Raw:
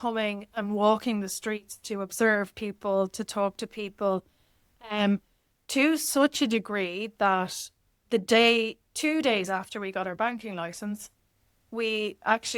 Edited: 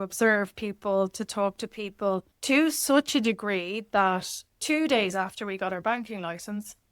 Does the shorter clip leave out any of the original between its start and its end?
yes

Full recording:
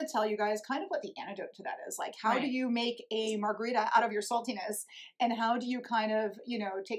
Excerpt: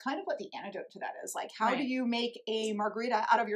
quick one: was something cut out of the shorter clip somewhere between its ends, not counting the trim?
no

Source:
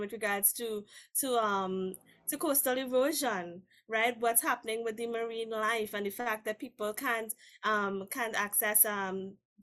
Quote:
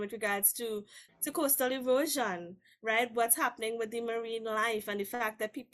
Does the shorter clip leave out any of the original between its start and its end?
yes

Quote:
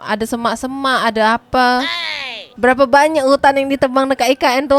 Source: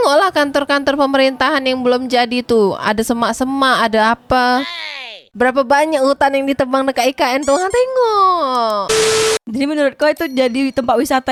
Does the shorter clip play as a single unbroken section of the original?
yes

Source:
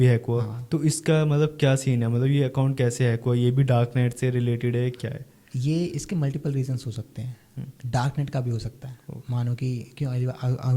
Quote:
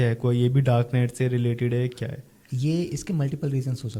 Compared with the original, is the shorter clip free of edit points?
yes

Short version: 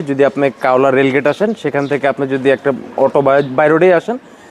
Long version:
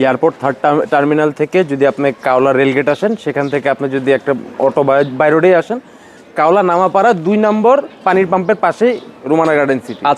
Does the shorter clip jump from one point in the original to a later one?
no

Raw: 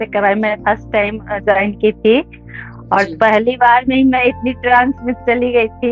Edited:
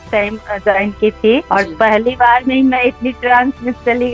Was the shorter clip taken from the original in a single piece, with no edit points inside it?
no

